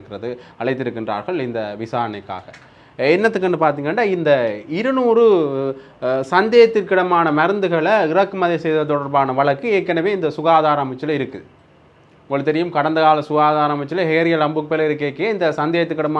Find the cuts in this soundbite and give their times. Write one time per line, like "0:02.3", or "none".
none